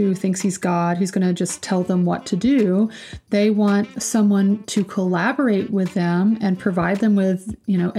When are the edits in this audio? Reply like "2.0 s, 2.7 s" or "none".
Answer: 3.9 s